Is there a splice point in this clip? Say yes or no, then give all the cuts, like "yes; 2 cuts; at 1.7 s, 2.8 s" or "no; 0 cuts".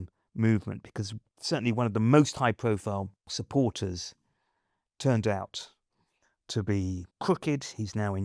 yes; 2 cuts; at 1.3 s, 3.2 s